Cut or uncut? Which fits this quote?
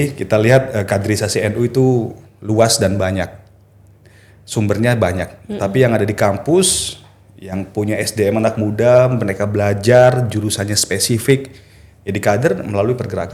uncut